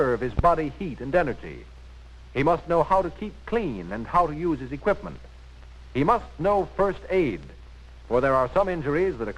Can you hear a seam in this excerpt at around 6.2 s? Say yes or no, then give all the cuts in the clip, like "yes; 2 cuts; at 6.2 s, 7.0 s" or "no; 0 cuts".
yes; 1 cut; at 6.2 s